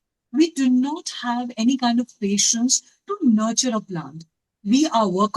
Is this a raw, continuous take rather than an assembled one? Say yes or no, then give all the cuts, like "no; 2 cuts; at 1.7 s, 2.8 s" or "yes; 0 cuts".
yes; 0 cuts